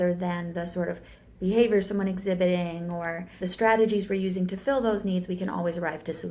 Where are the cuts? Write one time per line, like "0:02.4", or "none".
0:03.4